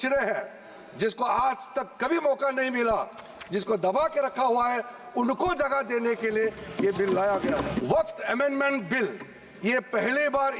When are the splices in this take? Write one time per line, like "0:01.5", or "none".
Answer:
0:08.0